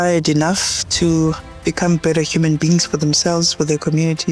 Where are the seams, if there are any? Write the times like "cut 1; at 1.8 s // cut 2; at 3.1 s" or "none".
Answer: none